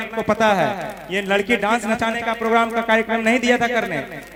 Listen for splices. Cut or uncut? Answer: uncut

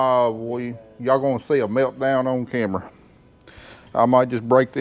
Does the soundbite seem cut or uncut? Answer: uncut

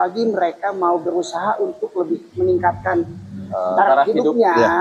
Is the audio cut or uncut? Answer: uncut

